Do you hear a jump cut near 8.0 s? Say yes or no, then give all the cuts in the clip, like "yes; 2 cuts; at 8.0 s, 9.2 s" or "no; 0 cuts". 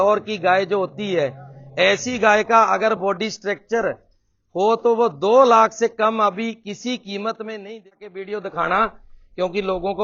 yes; 1 cut; at 8.0 s